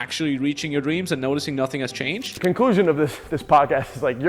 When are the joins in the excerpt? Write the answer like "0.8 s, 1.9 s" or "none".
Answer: 2.4 s